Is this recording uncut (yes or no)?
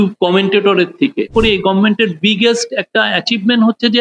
no